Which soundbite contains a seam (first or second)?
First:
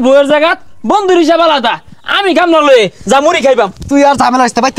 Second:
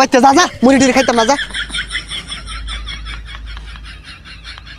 second